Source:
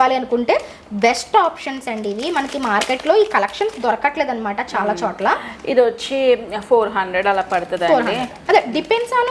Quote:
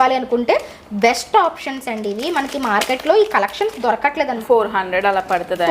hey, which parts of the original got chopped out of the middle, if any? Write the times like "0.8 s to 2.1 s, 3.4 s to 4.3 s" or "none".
4.4 s to 6.6 s